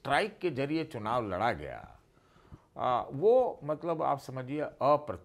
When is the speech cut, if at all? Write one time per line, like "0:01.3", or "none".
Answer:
none

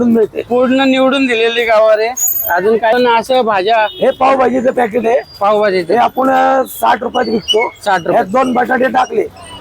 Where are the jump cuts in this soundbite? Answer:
0:02.9

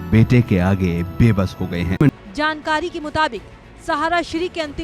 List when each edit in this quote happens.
0:02.2

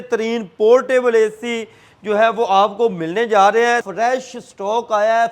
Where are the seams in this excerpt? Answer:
0:03.9

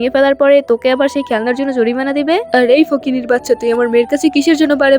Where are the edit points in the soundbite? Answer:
0:02.4

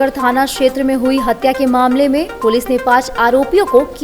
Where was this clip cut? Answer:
none

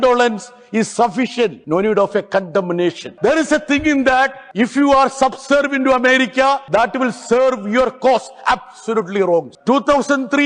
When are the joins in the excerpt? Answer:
0:01.6
0:03.1
0:04.4
0:06.6
0:09.5

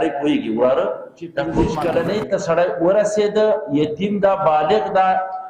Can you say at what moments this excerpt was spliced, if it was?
0:01.5

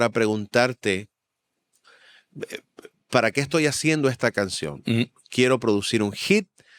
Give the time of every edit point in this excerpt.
none

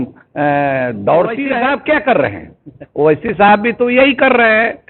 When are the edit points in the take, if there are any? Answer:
0:01.5

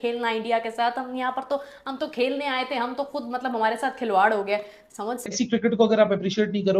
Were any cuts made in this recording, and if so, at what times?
0:05.2

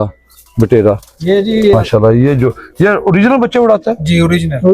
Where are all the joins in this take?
0:01.8

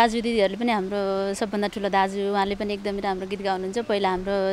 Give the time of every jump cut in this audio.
none

